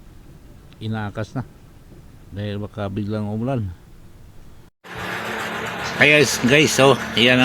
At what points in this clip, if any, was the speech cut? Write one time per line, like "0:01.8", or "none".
0:04.8